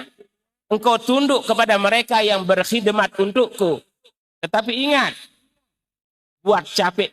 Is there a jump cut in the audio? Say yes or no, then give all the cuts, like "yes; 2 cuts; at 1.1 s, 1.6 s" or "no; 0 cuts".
no; 0 cuts